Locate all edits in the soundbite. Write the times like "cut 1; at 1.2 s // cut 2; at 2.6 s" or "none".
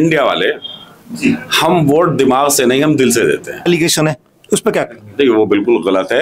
cut 1; at 3.7 s